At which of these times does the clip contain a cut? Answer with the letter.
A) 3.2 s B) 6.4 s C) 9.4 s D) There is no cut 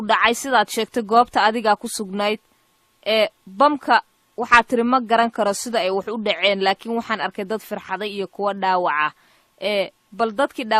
B